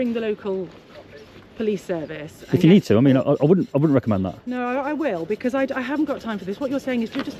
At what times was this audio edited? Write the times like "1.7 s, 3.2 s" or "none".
none